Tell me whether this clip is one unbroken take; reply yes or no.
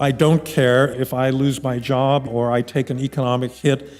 no